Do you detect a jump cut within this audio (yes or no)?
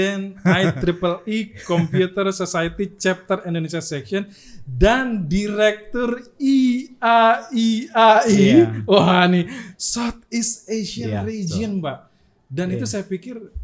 no